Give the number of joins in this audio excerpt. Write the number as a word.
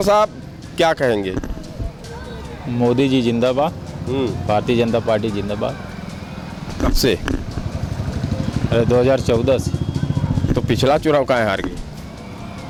zero